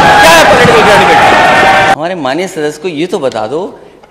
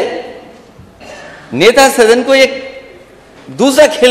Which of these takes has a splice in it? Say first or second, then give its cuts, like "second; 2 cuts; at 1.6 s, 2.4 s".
first; 1 cut; at 1.9 s